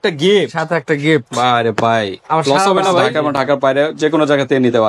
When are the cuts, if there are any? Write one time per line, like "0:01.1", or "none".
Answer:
0:03.1